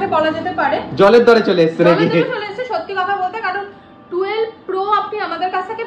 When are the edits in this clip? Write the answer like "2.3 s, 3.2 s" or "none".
none